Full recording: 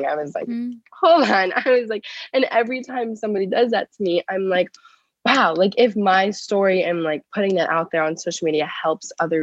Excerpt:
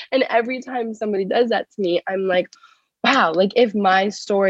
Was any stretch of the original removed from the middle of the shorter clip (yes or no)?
no